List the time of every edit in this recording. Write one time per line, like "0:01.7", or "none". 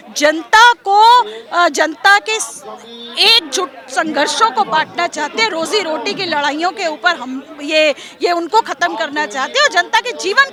none